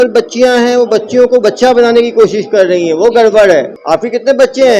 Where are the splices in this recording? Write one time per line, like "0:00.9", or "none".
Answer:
0:03.8